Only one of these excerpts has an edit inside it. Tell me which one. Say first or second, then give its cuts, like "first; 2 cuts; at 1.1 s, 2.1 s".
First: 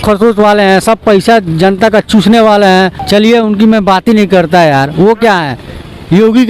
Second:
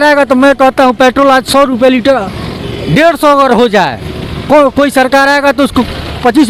first; 1 cut; at 3.0 s